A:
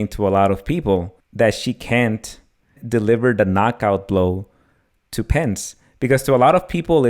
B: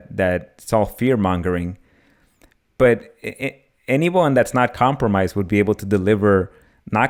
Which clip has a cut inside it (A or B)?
A